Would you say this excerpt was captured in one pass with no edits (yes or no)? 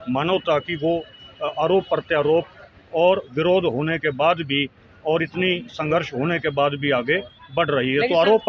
yes